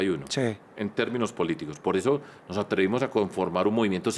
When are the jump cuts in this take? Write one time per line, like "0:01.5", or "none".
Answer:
none